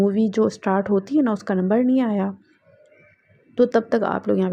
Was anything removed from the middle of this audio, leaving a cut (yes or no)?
no